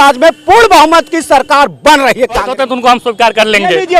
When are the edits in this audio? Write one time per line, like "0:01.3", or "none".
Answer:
0:02.5